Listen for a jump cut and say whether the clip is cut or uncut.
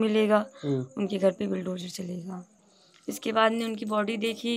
cut